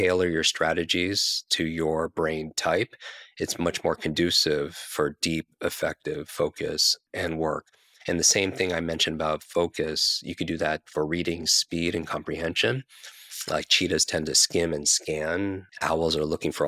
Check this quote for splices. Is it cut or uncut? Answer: cut